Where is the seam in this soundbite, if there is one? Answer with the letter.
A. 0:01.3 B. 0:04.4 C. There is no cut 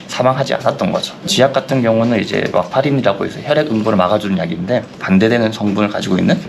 A